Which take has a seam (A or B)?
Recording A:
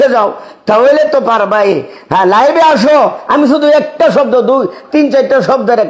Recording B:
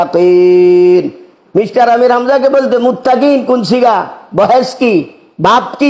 A